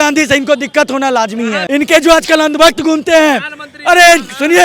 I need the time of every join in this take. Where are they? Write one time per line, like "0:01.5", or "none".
none